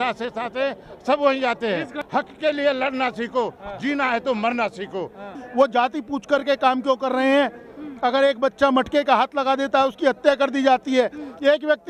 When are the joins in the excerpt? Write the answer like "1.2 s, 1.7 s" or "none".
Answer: 2.0 s, 5.3 s